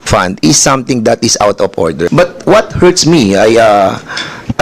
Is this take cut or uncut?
cut